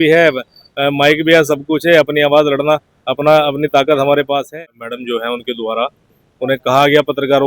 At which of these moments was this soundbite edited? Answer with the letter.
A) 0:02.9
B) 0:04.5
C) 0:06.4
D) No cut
B